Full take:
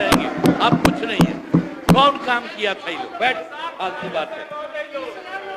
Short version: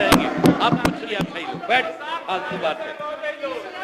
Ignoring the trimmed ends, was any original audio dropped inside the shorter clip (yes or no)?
yes